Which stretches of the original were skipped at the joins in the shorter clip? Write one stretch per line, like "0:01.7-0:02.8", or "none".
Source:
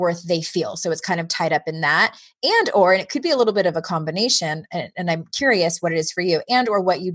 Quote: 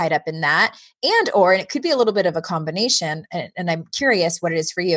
none